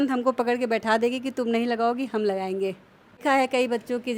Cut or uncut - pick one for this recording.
cut